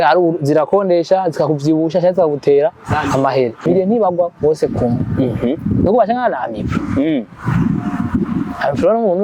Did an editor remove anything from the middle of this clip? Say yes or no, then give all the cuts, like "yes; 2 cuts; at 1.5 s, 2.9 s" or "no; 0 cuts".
yes; 1 cut; at 3.6 s